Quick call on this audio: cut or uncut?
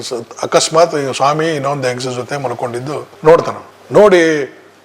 uncut